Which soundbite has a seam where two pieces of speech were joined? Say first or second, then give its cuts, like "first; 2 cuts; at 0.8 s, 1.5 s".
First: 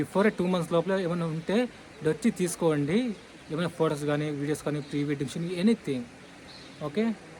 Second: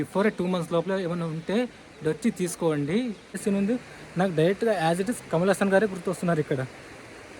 second; 1 cut; at 3.4 s